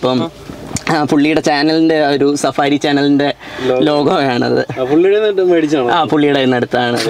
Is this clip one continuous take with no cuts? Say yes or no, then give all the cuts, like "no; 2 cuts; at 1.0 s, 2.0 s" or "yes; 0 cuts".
yes; 0 cuts